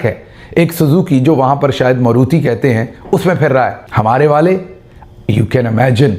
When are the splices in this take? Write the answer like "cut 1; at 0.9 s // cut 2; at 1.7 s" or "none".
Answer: cut 1; at 3.8 s